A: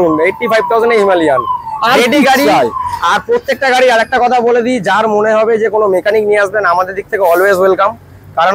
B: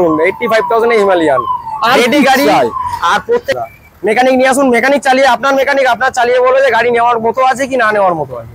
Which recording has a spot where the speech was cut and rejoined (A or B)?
B